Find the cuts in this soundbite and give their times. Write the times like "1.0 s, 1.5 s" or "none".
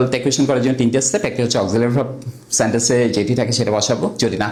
none